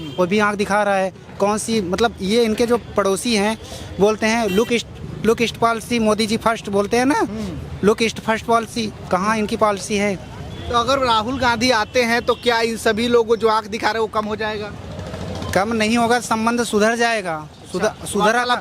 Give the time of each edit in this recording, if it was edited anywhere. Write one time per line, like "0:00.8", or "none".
none